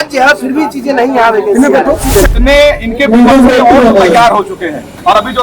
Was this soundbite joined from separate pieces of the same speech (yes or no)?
yes